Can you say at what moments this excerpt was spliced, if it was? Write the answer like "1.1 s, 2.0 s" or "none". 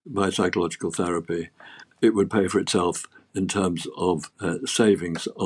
1.9 s, 4.3 s